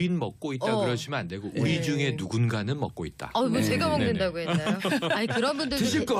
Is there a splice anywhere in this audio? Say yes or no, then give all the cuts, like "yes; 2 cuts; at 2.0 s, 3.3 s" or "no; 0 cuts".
yes; 1 cut; at 2.5 s